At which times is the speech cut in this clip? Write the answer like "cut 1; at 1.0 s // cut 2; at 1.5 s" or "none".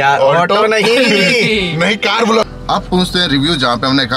cut 1; at 2.4 s